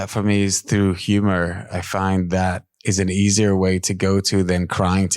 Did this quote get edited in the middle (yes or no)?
yes